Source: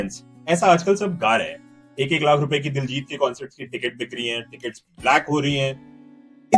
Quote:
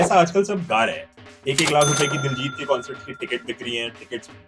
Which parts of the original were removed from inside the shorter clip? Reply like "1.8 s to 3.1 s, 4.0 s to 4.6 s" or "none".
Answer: none